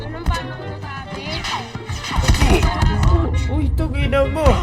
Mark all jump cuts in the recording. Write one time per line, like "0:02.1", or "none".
none